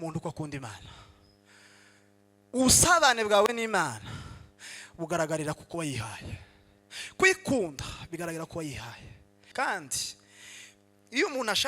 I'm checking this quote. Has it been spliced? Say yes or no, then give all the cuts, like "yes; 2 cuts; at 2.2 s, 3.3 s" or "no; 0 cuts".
yes; 1 cut; at 9.3 s